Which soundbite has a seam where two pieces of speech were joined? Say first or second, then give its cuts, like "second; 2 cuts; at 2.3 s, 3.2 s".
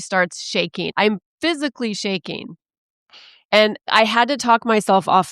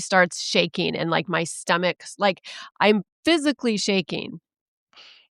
first; 2 cuts; at 0.9 s, 3.9 s